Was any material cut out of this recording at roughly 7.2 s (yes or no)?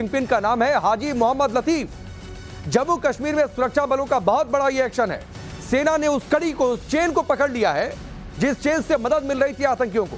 no